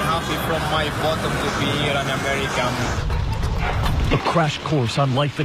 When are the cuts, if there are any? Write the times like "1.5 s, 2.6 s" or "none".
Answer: 4.1 s